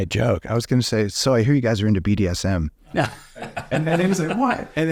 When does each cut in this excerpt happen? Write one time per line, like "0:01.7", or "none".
none